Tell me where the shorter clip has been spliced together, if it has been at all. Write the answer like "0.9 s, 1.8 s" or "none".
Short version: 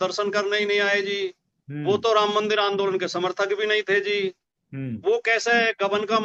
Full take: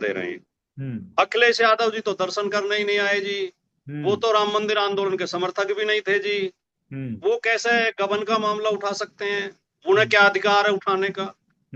none